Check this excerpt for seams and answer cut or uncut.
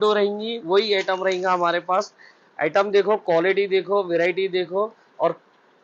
uncut